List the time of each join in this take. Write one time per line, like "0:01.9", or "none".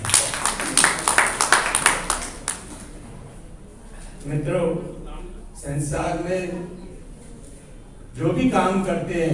0:03.0